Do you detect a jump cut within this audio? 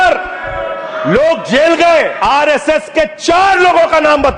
yes; 1 cut; at 2.1 s

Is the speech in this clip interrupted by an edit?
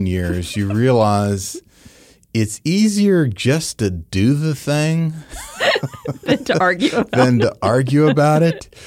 no; 0 cuts

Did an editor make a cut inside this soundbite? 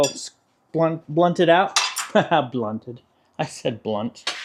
no; 0 cuts

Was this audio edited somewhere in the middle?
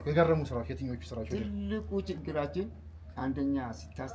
no; 0 cuts

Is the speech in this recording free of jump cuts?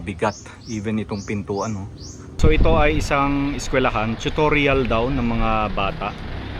no; 1 cut; at 2.4 s

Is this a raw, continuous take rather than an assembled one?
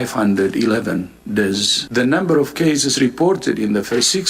no; 1 cut; at 1.8 s

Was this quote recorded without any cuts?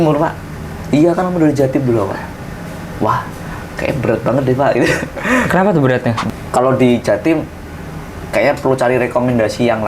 no; 1 cut; at 6.2 s

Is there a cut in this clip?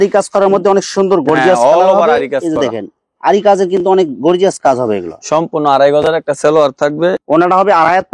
no; 0 cuts

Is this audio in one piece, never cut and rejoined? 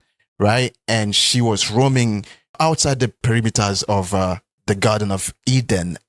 no; 1 cut; at 3.2 s

